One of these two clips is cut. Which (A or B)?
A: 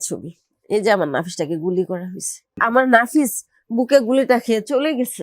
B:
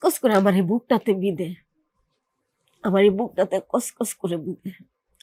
A